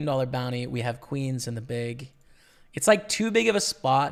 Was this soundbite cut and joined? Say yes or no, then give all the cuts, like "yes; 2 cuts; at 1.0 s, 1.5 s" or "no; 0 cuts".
no; 0 cuts